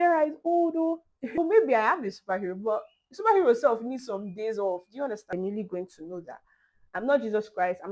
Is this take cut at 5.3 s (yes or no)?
yes